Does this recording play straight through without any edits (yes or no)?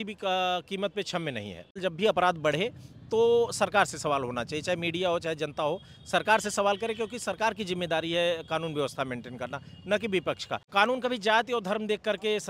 no